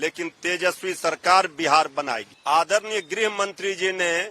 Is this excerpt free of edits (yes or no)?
no